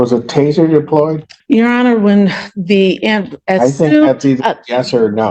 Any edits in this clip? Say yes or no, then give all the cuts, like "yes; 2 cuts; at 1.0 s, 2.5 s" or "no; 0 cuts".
yes; 1 cut; at 1.3 s